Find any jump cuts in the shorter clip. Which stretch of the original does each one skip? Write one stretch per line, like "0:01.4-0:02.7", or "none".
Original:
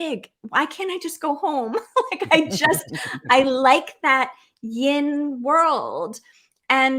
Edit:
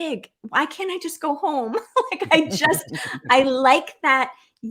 none